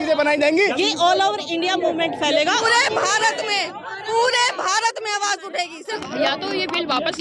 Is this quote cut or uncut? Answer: cut